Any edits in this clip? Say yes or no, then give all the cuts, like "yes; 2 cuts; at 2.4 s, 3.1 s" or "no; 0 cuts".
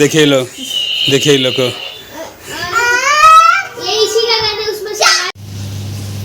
yes; 1 cut; at 5.3 s